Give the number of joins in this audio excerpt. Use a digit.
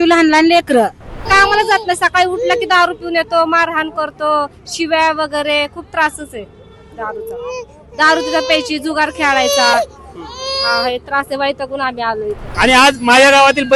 2